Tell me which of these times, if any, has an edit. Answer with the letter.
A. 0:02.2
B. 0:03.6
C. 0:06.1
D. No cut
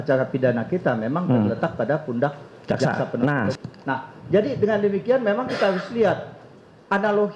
B